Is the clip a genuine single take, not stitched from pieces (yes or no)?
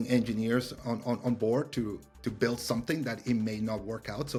yes